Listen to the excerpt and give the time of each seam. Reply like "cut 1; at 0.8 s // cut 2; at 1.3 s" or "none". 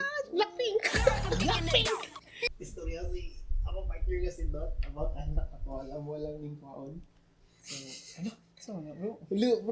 cut 1; at 2.5 s